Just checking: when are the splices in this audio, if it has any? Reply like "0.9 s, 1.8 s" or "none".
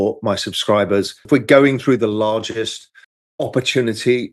1.2 s